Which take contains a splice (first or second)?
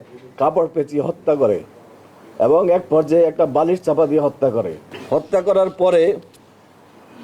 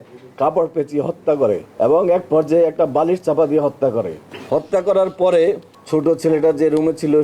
second